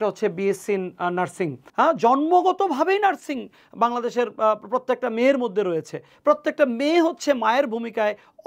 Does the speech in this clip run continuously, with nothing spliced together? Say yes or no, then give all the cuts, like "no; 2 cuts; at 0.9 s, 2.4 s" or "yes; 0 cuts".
no; 1 cut; at 1.6 s